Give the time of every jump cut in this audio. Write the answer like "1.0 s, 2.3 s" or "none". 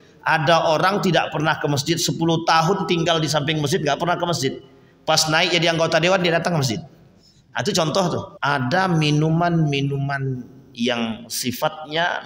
8.3 s